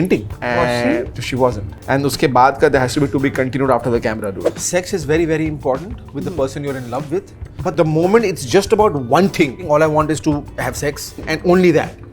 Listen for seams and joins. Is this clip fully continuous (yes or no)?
no